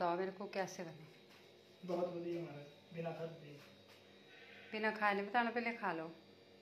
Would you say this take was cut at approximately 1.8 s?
no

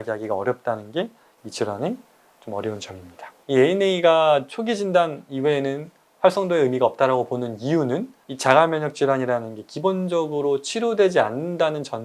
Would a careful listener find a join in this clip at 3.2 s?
yes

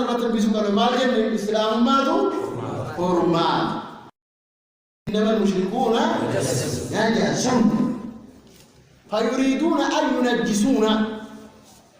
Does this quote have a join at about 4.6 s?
yes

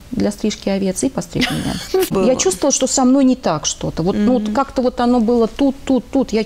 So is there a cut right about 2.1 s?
yes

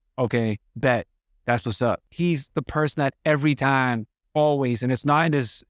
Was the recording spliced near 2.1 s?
yes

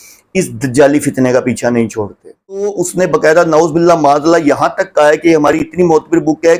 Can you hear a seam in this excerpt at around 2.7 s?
yes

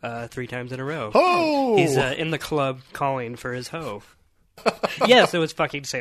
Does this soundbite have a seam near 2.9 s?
no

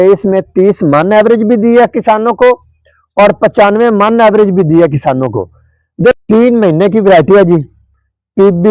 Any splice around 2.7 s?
no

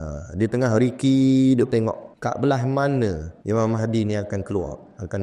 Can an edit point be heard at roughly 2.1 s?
yes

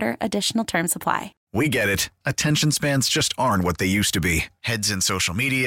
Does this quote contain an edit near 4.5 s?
no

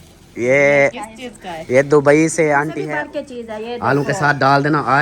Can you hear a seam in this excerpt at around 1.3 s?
no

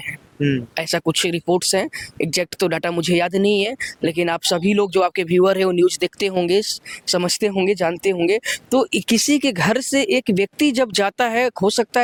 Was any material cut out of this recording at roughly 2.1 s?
no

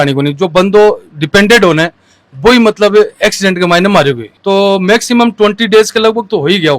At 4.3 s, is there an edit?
yes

